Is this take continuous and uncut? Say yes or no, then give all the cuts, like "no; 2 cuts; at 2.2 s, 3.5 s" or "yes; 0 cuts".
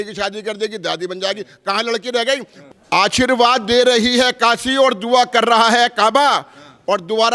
no; 1 cut; at 2.6 s